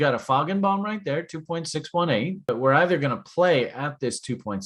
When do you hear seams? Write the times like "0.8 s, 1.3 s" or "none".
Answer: 2.5 s